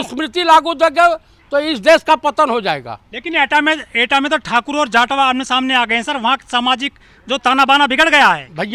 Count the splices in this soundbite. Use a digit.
0